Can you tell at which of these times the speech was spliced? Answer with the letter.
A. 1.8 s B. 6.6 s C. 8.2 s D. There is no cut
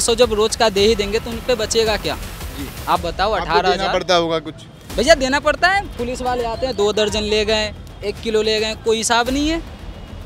D